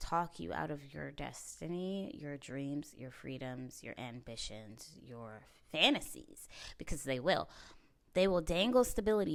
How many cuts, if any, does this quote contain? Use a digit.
0